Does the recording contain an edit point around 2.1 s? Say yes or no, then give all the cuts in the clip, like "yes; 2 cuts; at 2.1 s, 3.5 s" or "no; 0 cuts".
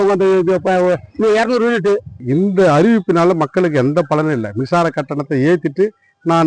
yes; 1 cut; at 2.1 s